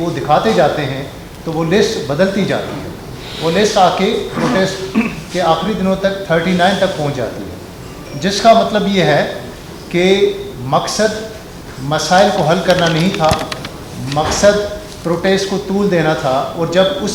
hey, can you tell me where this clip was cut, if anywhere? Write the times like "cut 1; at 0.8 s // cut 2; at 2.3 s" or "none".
none